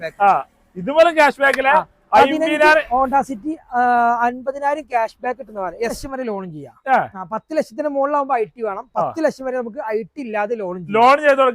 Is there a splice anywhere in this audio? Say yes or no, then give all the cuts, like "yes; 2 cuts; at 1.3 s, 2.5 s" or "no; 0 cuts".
yes; 1 cut; at 6.0 s